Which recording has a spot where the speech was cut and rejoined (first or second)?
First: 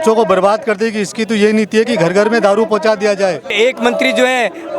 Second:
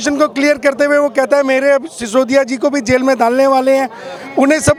first